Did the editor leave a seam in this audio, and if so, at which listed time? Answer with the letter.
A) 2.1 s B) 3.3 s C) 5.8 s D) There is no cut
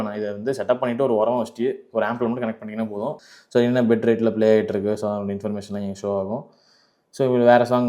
B